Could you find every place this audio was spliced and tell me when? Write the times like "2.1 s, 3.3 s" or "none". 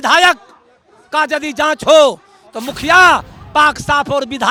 none